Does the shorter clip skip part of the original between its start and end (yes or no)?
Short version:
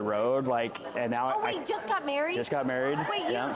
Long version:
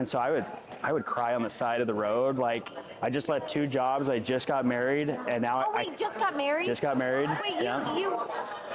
yes